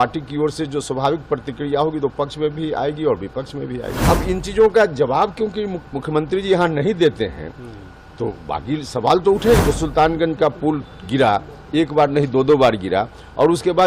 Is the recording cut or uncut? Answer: cut